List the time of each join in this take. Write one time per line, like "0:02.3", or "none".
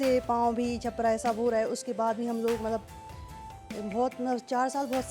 none